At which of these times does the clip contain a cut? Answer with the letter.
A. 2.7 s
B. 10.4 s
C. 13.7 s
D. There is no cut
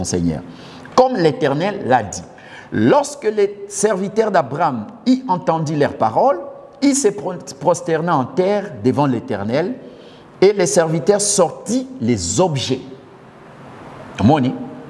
D